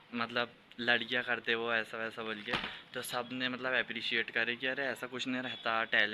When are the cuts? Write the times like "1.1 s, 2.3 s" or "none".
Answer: none